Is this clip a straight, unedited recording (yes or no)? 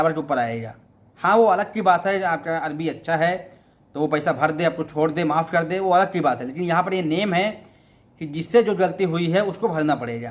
yes